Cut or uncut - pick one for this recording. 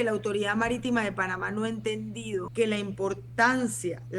cut